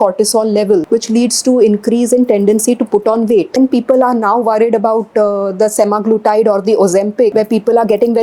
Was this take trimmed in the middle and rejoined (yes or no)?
yes